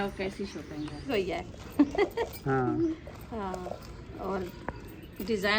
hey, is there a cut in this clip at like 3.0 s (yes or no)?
no